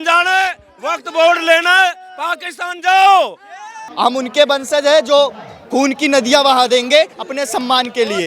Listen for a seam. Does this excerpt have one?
yes; 1 cut; at 3.9 s

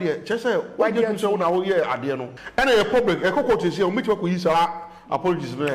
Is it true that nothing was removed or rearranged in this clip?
no; 1 cut; at 2.3 s

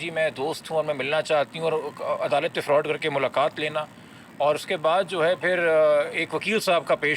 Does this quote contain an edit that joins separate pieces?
no; 0 cuts

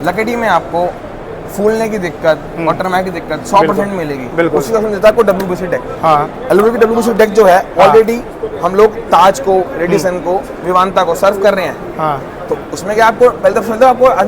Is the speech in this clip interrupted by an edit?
no; 0 cuts

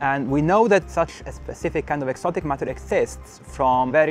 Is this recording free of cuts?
yes; 0 cuts

